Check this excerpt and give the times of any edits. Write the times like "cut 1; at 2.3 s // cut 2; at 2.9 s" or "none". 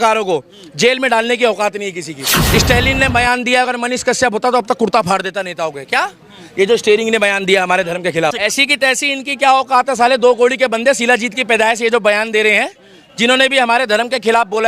cut 1; at 2.4 s // cut 2; at 8.4 s